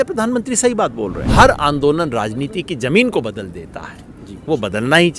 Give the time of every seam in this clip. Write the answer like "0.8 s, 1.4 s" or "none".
1.2 s

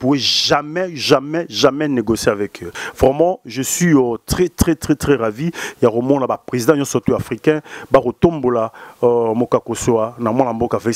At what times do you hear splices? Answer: 2.8 s

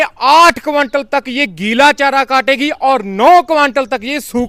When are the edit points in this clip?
none

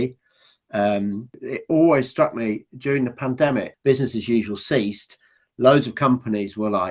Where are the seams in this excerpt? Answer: 1.4 s, 3.7 s

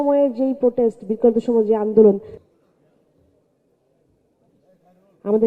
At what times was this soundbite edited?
2.3 s

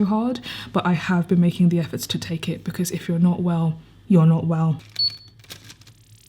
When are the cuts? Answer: 4.9 s

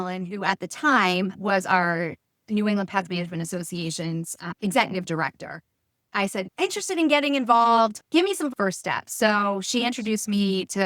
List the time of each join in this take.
4.5 s, 6.2 s, 8.5 s

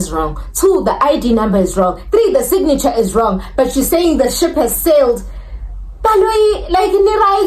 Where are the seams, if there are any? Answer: none

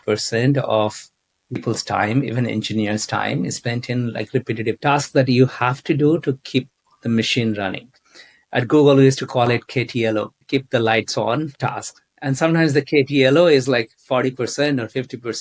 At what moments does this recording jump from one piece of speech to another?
4.8 s, 10.4 s

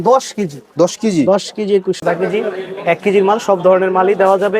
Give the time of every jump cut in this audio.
2.0 s

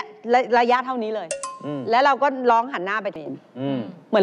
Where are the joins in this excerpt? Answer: 3.2 s

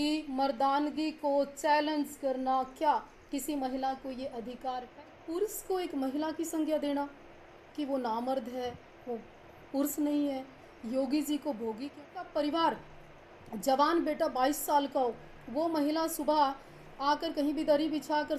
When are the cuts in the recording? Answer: 4.9 s, 12.0 s

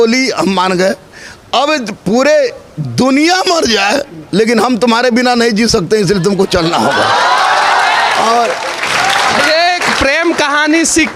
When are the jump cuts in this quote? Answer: none

